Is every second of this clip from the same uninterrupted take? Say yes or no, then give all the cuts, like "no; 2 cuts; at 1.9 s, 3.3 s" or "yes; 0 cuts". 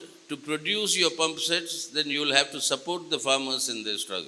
yes; 0 cuts